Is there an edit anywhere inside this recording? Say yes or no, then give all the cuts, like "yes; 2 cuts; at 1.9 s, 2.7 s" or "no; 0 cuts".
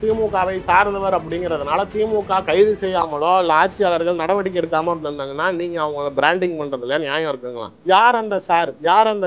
yes; 1 cut; at 7.7 s